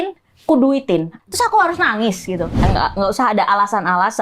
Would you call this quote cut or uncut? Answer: cut